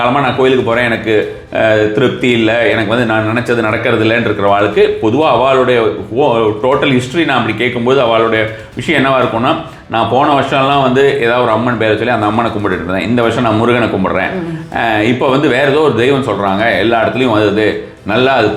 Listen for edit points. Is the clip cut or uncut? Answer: uncut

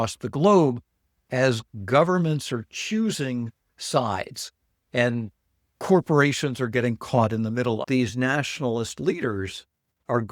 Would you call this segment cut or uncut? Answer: cut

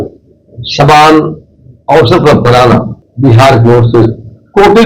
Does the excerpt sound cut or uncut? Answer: cut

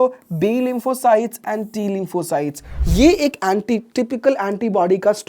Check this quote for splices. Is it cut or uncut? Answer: cut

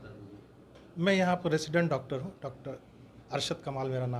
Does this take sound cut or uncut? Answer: uncut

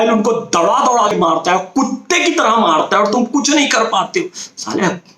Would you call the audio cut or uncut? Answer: cut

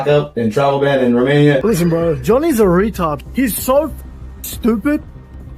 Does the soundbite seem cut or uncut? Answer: cut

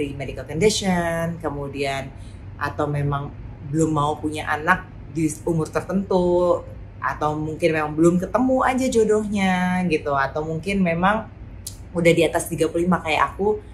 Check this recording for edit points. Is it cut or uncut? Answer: uncut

